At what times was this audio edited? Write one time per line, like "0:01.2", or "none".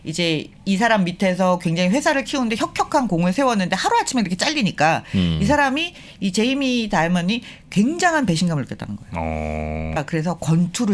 0:10.0